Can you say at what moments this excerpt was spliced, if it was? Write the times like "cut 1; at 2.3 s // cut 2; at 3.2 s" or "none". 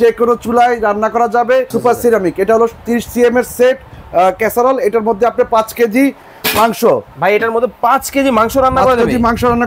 cut 1; at 1.7 s